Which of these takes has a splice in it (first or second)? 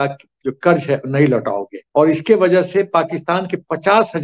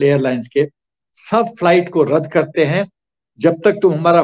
first